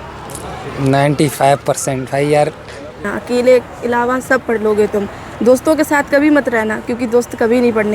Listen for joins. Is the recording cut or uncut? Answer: cut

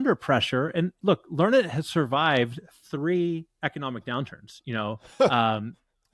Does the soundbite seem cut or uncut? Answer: cut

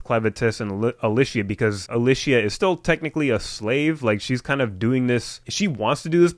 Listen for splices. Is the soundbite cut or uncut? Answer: cut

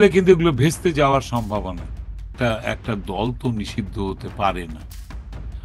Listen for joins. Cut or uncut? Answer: cut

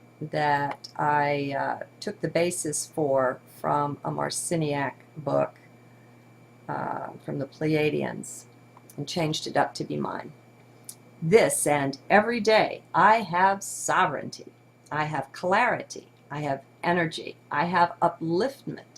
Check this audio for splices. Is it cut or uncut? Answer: cut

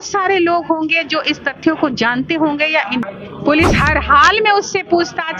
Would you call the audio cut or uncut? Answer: cut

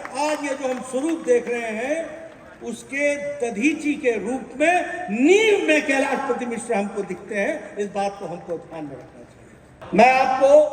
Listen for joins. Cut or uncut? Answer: cut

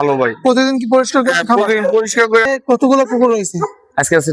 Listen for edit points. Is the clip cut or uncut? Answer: cut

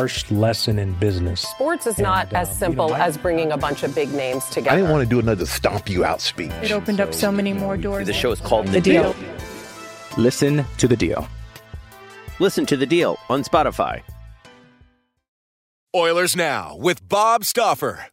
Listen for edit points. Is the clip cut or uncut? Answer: cut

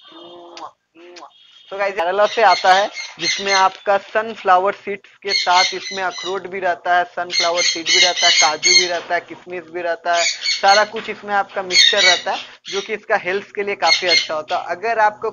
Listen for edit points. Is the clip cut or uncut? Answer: cut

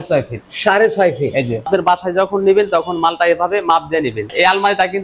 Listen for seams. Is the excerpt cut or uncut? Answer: cut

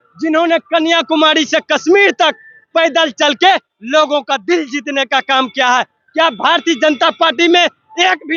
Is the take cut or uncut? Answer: uncut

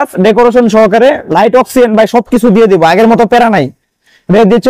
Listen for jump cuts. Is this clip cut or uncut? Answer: uncut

